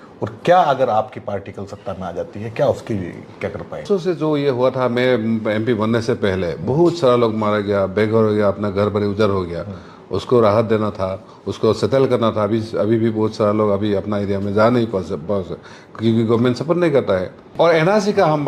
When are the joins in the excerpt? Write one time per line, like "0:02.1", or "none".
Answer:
0:03.8
0:17.4

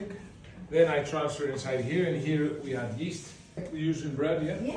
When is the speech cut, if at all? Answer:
0:03.7

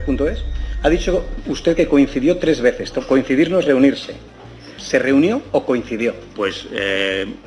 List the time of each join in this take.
none

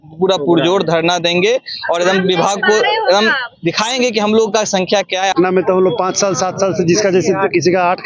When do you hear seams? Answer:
0:05.3

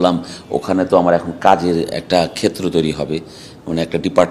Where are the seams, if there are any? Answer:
none

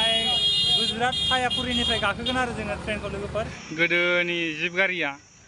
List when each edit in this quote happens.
0:03.6

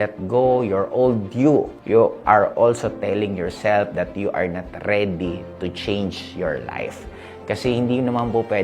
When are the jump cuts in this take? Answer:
0:01.8

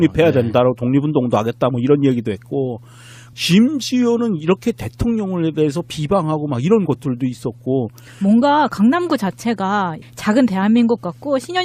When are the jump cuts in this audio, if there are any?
none

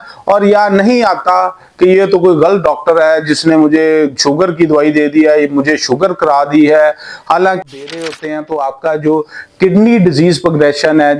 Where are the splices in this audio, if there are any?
0:07.6

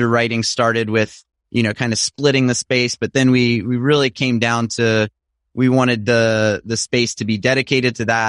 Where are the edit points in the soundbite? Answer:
none

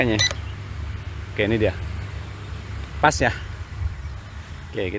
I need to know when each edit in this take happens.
none

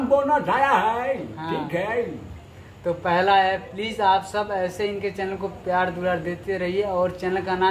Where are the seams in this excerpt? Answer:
none

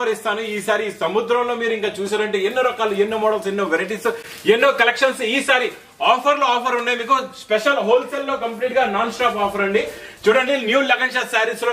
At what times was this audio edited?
none

